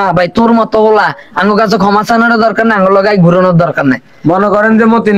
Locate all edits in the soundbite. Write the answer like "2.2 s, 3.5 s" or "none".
none